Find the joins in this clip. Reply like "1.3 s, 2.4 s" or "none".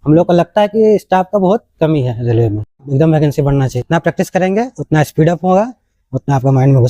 2.9 s, 3.8 s